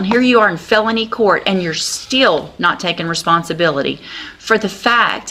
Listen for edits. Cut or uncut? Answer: uncut